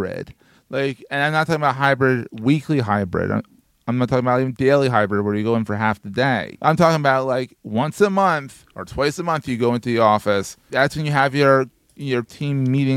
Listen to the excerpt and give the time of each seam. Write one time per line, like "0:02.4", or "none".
0:06.5
0:10.6

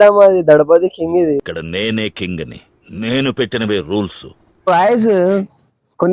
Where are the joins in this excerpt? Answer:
0:04.7

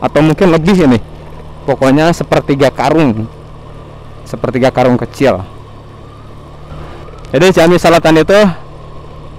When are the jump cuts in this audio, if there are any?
0:07.0

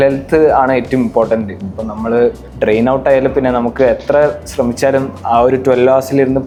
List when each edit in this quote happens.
none

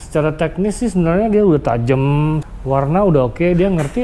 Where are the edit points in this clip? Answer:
0:02.5

